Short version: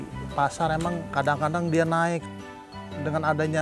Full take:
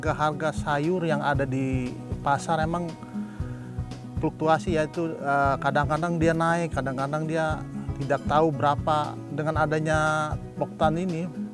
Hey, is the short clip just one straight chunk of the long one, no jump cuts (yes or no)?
no